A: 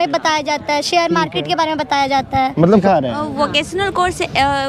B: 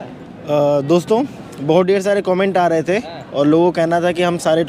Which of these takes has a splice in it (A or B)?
A